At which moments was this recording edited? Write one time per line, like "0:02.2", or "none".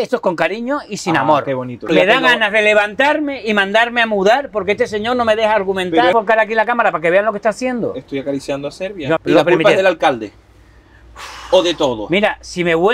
0:01.9
0:06.1
0:09.2